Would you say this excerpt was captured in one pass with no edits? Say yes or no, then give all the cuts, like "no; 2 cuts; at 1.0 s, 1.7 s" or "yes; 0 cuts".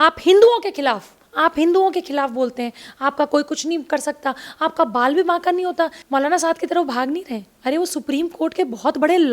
no; 1 cut; at 6.0 s